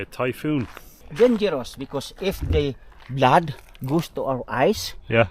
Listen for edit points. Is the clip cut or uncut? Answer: cut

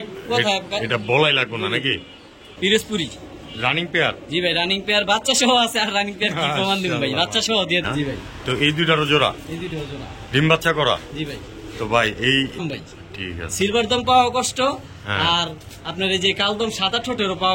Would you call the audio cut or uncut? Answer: cut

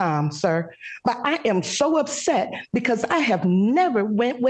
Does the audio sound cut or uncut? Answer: uncut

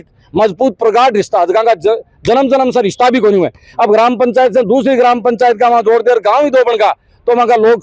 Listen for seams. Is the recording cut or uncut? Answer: uncut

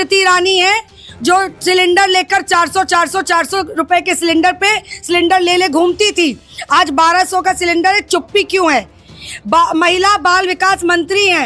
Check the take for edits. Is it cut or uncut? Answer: uncut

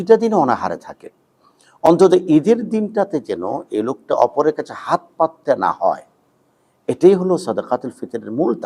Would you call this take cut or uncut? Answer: uncut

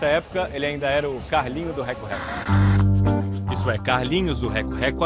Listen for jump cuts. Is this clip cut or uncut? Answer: cut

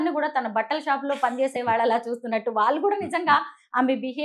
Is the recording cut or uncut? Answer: uncut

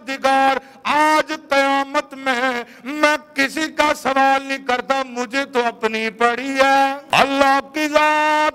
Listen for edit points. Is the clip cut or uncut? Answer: cut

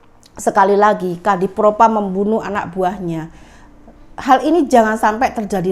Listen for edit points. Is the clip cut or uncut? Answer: uncut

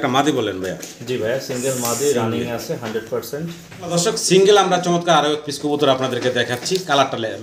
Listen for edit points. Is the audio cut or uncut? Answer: cut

